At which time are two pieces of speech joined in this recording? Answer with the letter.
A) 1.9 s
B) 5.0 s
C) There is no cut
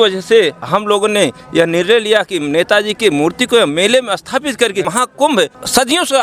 B